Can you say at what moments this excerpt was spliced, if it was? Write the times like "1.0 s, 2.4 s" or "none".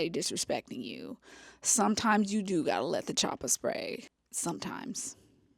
4.1 s